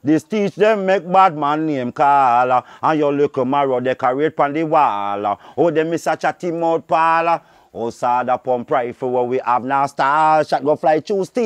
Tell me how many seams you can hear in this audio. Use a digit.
0